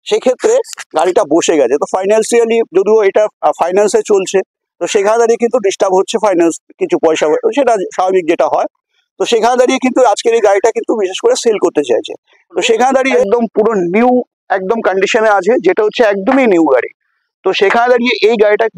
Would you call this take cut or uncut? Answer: cut